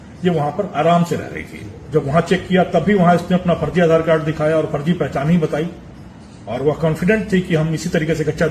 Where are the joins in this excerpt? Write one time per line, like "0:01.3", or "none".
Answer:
0:01.8